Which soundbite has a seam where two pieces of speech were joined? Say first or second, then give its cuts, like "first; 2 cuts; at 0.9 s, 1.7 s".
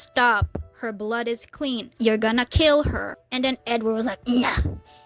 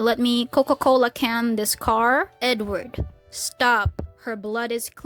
second; 1 cut; at 2.3 s